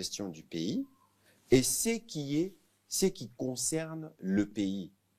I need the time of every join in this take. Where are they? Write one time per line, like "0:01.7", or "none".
none